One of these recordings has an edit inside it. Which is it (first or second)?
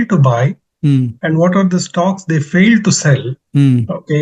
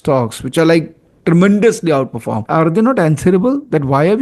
second